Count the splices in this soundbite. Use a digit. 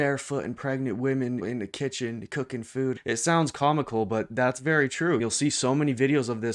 3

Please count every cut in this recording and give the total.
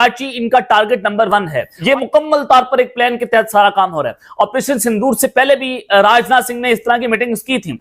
1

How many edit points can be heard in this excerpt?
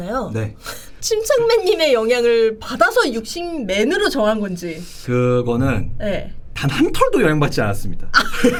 0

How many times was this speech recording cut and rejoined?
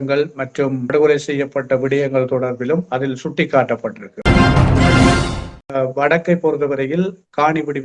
3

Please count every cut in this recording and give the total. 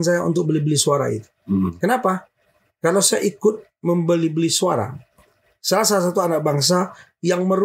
0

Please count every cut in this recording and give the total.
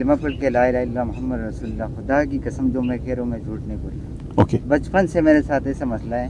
0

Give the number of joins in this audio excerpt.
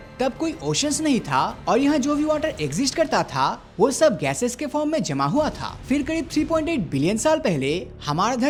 0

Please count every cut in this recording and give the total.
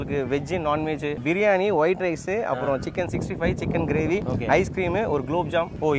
1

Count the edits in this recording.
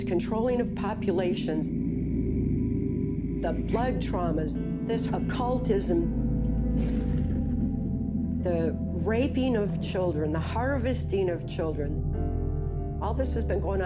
0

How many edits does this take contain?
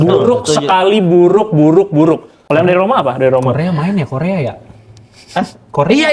1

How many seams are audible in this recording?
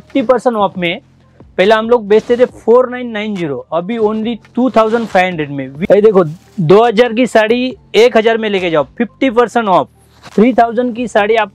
2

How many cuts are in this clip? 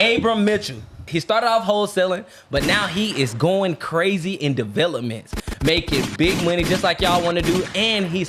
1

